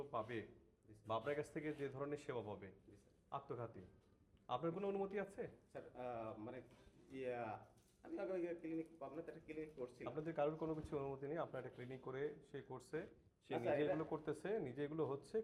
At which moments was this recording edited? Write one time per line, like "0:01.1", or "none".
none